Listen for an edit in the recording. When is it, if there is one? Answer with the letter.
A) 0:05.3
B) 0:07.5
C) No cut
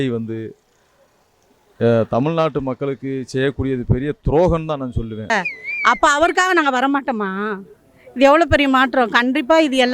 A